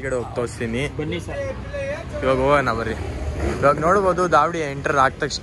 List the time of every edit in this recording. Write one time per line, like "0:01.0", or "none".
none